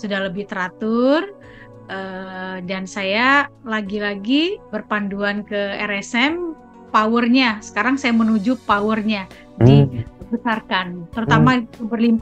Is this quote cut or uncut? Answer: cut